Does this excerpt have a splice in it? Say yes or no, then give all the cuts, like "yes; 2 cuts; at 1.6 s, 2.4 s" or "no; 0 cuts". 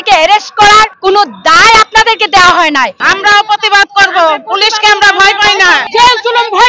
yes; 2 cuts; at 0.9 s, 3.0 s